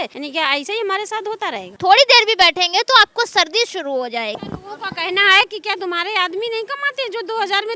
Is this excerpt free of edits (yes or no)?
no